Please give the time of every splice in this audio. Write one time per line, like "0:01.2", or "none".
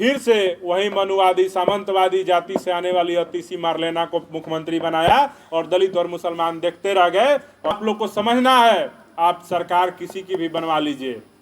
0:07.8